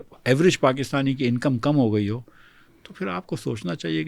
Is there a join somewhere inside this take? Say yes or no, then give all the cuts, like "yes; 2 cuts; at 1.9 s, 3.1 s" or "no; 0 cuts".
no; 0 cuts